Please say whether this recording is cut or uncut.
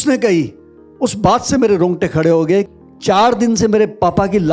cut